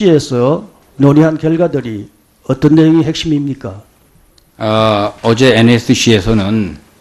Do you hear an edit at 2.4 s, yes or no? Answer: no